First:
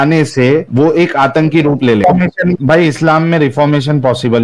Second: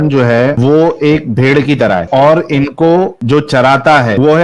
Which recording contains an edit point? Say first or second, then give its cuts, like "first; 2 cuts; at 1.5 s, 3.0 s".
first; 1 cut; at 2.0 s